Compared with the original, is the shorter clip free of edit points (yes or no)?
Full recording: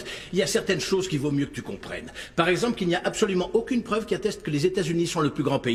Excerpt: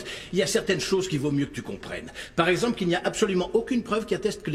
yes